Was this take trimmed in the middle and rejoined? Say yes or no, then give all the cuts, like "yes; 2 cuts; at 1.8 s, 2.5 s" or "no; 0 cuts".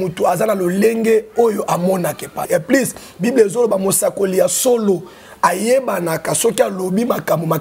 yes; 1 cut; at 2.5 s